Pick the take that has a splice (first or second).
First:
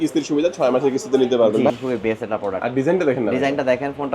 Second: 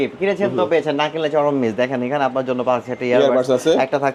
first